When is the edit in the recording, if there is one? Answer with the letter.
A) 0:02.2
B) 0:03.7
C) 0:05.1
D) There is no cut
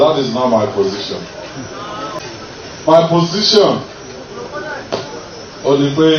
A